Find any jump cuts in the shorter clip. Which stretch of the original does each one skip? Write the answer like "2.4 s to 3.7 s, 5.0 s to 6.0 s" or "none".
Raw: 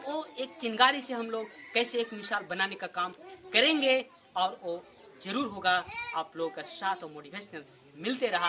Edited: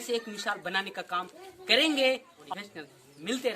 4.2 s to 7.1 s